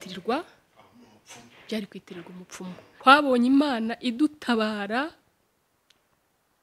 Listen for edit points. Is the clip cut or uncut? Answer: cut